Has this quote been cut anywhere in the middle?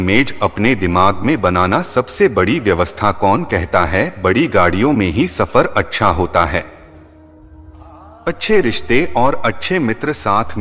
no; 0 cuts

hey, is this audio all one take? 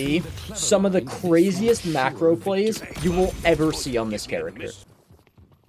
no; 1 cut; at 4.8 s

